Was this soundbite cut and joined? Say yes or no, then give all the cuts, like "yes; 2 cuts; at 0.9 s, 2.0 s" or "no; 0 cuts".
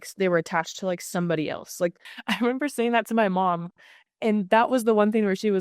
yes; 1 cut; at 2.1 s